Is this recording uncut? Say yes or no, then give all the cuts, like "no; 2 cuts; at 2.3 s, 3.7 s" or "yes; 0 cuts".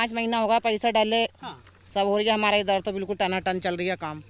yes; 0 cuts